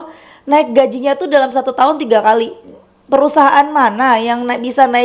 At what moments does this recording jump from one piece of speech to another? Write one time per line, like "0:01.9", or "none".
none